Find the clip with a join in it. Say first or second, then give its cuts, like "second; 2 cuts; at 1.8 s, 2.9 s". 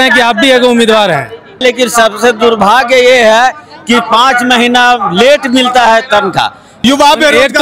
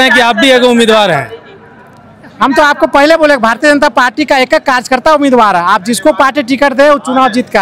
first; 2 cuts; at 1.6 s, 6.7 s